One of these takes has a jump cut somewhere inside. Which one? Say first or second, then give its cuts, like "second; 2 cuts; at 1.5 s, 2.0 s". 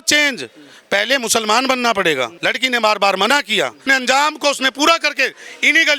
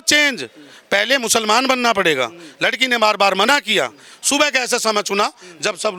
first; 2 cuts; at 2.4 s, 3.8 s